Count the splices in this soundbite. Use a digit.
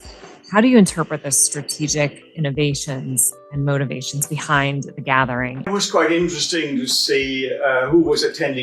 1